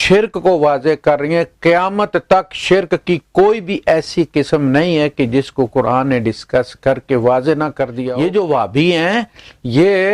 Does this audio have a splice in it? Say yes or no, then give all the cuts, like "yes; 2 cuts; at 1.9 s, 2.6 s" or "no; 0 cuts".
yes; 1 cut; at 8.0 s